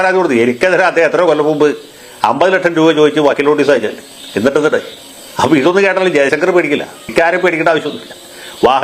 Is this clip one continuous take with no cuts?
no; 1 cut; at 7.0 s

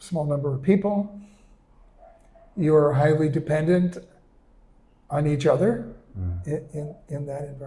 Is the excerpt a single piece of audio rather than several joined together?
yes; 0 cuts

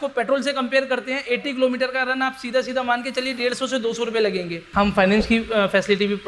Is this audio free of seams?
no; 1 cut; at 4.7 s

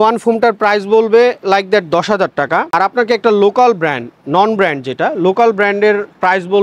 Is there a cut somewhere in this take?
no; 0 cuts

